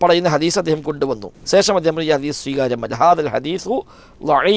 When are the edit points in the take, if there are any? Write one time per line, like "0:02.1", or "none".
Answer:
0:01.3